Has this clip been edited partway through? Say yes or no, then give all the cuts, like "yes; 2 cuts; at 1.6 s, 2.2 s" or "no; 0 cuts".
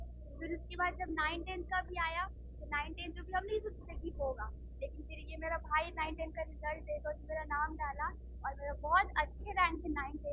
no; 0 cuts